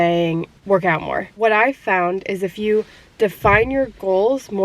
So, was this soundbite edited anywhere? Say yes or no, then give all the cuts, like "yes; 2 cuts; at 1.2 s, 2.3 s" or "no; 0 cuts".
yes; 1 cut; at 0.9 s